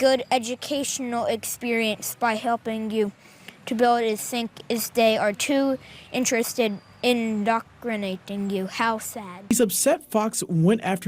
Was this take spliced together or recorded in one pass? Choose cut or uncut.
cut